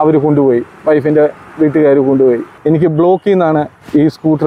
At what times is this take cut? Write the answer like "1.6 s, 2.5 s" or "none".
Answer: 2.5 s